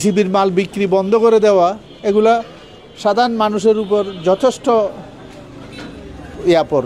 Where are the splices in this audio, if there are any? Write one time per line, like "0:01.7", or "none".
none

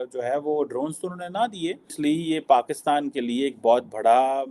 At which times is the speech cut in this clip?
0:01.9

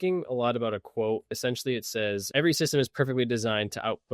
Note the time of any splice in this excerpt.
0:01.3
0:02.3

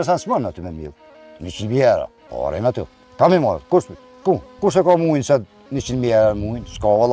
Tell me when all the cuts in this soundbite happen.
0:02.2
0:04.6

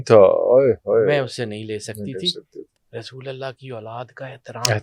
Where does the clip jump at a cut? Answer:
0:02.6

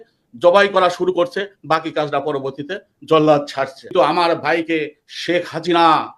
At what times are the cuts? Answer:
0:03.8

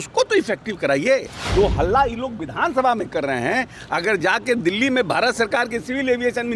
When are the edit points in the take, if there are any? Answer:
0:01.4

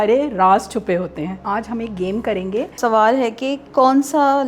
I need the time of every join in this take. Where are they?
0:01.4
0:02.8

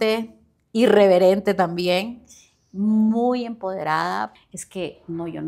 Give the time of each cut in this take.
0:04.3

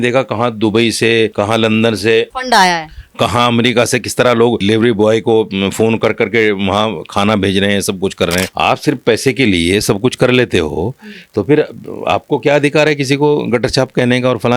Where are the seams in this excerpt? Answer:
0:01.3
0:02.3
0:04.6
0:08.5

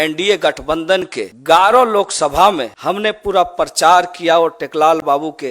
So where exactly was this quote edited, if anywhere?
0:01.3
0:02.7

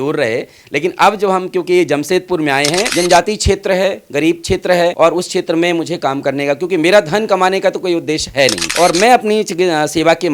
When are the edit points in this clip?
0:02.9
0:04.9

